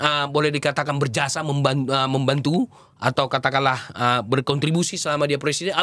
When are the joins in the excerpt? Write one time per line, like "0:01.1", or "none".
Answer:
none